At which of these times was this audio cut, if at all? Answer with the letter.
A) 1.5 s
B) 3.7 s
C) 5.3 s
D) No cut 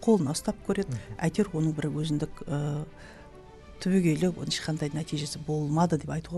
D